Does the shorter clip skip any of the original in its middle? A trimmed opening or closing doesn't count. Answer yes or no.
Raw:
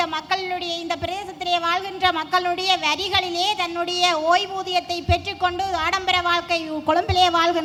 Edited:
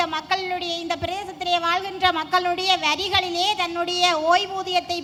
no